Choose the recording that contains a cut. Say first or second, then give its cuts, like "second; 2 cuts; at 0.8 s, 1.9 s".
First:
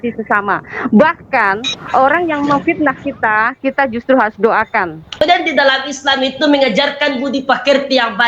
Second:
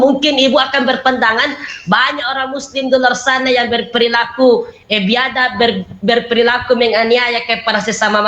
first; 1 cut; at 5.2 s